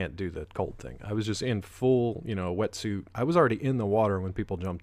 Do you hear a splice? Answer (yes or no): yes